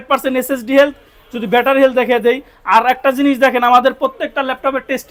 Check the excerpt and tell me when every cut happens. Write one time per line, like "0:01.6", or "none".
none